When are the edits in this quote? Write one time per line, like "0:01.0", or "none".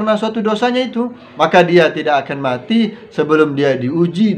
0:01.2